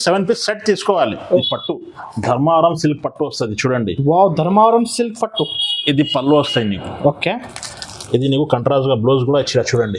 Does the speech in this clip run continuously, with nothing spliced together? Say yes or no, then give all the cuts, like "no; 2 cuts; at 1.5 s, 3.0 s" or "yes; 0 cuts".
no; 1 cut; at 1.3 s